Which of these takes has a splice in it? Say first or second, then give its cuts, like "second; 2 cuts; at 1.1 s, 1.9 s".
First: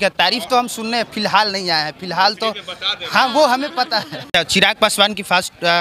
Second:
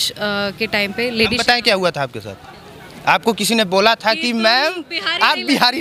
first; 1 cut; at 4.2 s